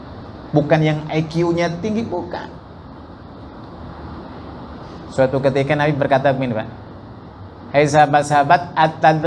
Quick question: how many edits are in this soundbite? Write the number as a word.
zero